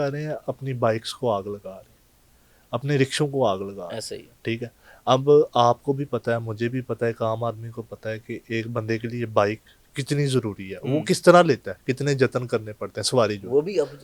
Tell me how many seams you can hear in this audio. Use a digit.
0